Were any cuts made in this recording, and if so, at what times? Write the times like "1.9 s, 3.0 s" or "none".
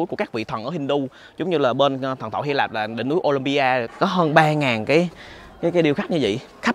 3.9 s